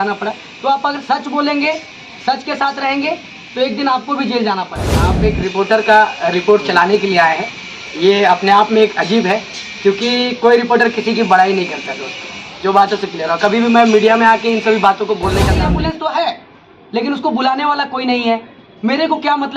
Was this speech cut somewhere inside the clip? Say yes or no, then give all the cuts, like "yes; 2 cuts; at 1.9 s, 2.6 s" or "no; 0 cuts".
yes; 2 cuts; at 5.2 s, 15.5 s